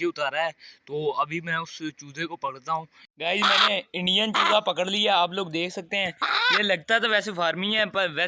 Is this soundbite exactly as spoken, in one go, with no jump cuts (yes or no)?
no